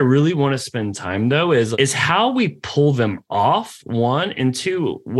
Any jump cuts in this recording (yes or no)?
no